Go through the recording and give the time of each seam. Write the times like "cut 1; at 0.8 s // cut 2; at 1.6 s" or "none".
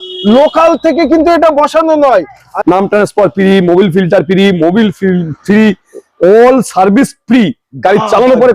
cut 1; at 2.5 s

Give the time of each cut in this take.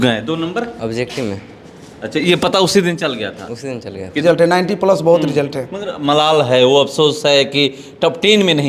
cut 1; at 4.2 s

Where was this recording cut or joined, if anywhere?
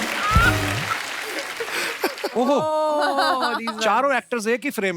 cut 1; at 2.2 s

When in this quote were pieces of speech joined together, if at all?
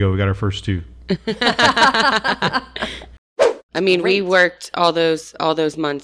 cut 1; at 3.2 s

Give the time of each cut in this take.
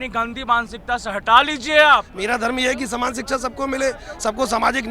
cut 1; at 2.1 s

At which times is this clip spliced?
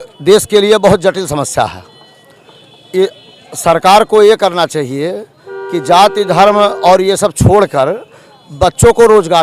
none

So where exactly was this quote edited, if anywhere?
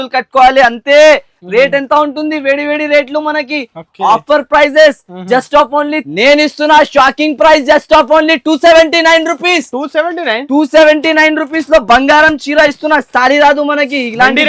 cut 1; at 6.0 s

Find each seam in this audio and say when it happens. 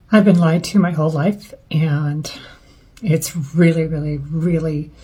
none

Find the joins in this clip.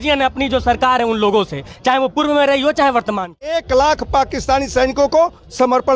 cut 1; at 3.6 s

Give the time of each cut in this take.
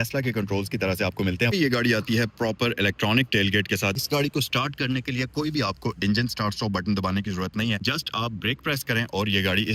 cut 1; at 1.5 s // cut 2; at 4.0 s // cut 3; at 7.8 s

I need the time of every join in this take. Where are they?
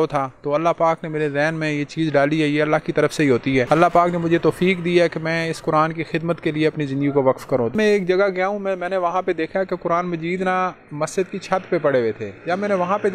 cut 1; at 3.7 s // cut 2; at 7.7 s

